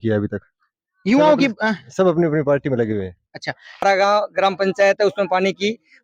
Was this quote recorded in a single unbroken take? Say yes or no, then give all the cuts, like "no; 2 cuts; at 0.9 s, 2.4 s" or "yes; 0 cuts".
no; 1 cut; at 3.8 s